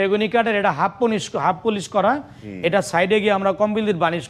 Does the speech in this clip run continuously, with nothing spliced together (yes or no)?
yes